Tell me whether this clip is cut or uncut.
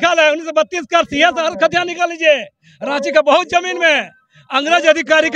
uncut